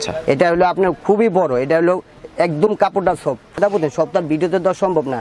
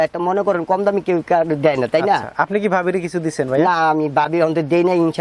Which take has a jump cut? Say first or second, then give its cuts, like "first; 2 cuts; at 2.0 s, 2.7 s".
first; 1 cut; at 3.6 s